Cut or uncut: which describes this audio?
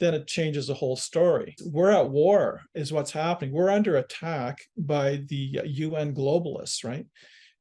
cut